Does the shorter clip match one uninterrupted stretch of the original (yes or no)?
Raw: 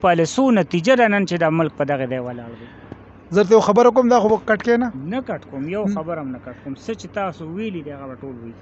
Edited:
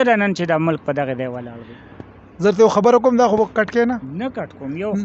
yes